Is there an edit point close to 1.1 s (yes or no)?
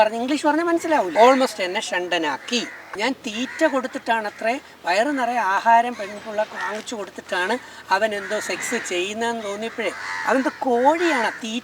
yes